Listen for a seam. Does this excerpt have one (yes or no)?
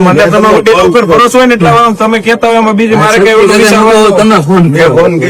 no